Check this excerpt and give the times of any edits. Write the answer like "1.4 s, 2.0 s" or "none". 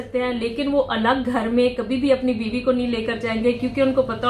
none